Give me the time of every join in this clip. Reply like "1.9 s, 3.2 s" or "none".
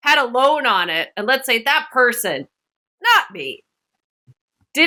none